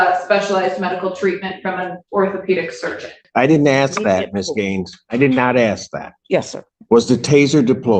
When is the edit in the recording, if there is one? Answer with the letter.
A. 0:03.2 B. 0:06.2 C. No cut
A